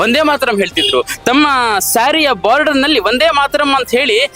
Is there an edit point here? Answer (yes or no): no